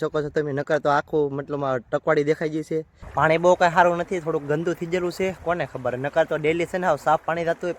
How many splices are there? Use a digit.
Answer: 1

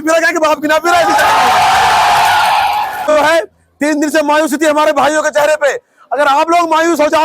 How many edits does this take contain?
1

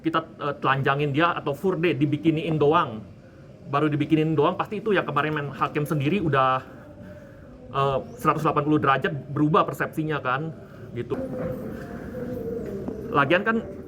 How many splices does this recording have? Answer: 1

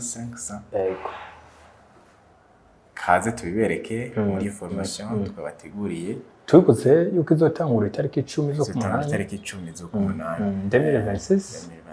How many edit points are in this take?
0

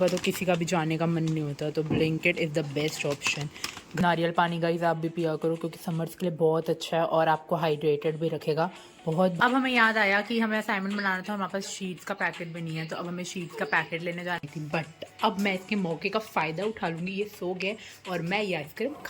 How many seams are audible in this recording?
3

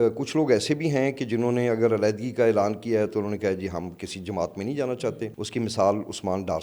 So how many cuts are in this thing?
1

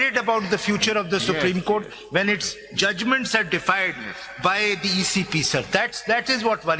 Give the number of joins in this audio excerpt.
0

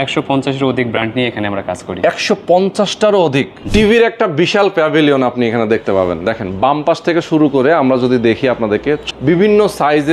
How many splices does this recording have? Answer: 2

